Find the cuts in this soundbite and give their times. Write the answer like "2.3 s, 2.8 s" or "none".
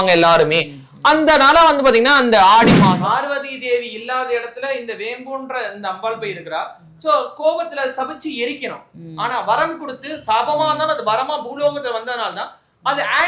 2.9 s